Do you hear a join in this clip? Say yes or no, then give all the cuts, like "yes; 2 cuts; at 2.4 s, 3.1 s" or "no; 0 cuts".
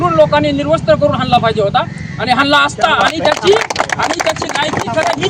no; 0 cuts